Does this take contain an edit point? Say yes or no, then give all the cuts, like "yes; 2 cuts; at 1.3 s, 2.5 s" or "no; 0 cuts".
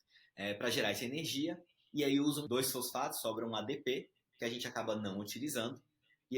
yes; 1 cut; at 2.4 s